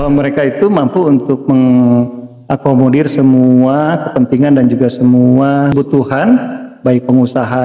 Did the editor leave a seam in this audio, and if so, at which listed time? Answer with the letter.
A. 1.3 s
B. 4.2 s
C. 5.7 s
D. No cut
C